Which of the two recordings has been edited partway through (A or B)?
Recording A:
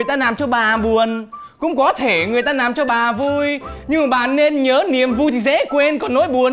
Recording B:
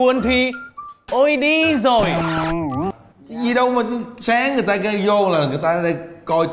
B